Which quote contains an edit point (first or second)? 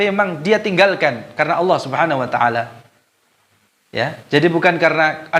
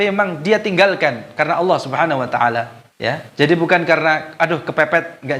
second